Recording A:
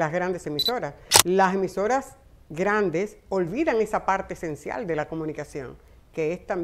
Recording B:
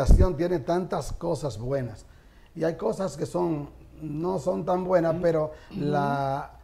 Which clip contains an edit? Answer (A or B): A